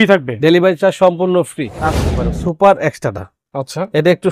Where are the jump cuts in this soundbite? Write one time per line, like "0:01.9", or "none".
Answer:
0:02.1